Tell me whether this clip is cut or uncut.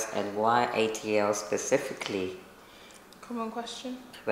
uncut